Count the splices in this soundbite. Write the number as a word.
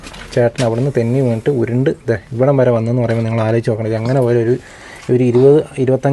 zero